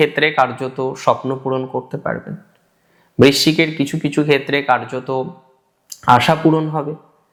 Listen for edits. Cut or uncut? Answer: uncut